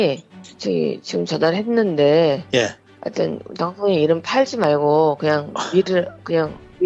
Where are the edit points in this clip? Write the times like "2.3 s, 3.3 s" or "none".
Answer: none